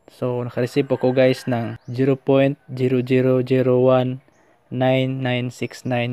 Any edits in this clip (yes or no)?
yes